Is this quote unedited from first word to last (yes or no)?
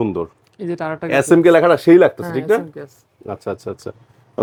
yes